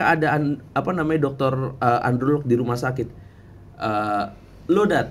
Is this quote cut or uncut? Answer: uncut